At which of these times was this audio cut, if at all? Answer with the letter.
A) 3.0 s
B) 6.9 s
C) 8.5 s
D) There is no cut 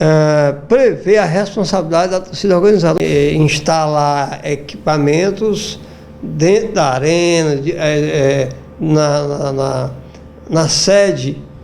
A